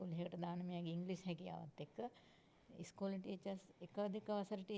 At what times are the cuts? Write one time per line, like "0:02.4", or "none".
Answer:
none

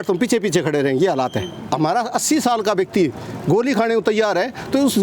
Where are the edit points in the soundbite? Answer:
0:01.5

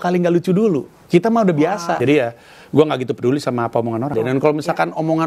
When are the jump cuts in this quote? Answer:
0:02.0
0:04.1

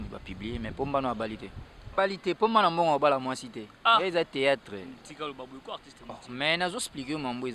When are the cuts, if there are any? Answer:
0:01.9

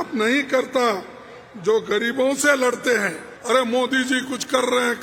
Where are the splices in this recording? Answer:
0:03.3

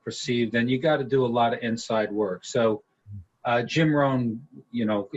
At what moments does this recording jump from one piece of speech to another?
none

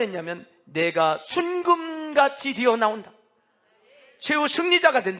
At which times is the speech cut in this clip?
none

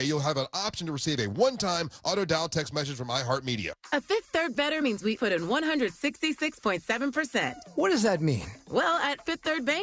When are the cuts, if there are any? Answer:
0:03.8

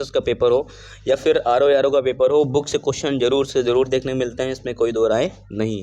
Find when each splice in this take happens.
none

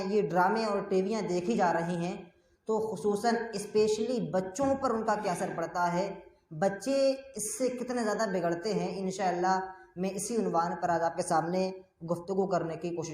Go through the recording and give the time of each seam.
none

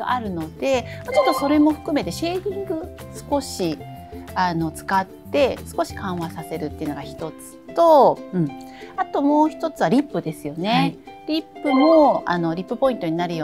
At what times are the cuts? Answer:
none

